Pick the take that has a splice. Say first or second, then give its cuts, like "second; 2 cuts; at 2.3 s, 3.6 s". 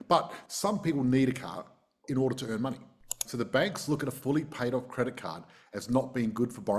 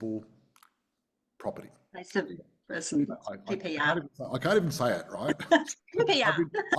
first; 1 cut; at 3.2 s